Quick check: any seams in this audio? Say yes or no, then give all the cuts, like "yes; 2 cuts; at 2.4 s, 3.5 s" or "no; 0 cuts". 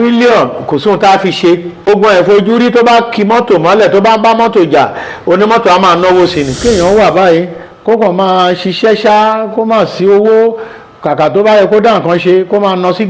yes; 2 cuts; at 1.9 s, 6.5 s